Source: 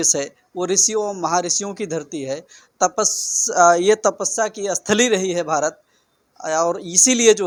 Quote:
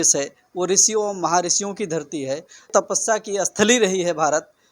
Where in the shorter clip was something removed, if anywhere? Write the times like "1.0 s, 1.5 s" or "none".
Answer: 2.7 s